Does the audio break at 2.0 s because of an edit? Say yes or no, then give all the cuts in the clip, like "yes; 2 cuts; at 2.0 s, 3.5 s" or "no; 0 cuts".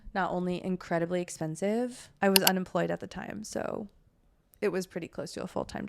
yes; 1 cut; at 2.0 s